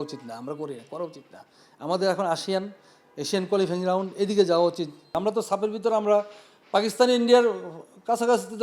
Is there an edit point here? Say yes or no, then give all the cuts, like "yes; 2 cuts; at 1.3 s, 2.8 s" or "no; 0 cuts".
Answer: yes; 1 cut; at 5.0 s